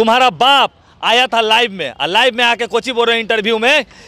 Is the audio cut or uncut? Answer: uncut